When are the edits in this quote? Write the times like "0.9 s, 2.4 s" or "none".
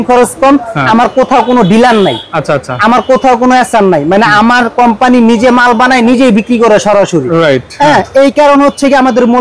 none